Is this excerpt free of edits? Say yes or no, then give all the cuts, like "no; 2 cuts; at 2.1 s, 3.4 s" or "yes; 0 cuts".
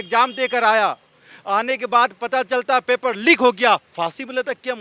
yes; 0 cuts